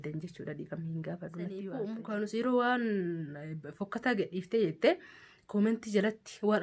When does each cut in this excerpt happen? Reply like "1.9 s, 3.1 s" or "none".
1.7 s